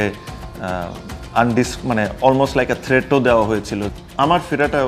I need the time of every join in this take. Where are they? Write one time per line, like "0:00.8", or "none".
0:03.9

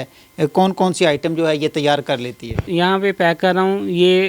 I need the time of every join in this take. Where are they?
0:02.7

